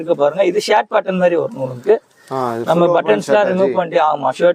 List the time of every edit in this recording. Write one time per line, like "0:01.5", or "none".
none